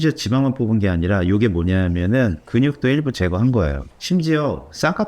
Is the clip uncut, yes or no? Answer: no